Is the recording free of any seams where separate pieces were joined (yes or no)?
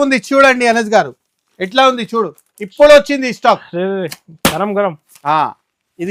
yes